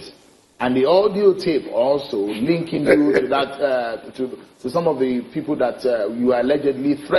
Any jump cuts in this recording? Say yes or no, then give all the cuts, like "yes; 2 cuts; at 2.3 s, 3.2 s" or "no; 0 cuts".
no; 0 cuts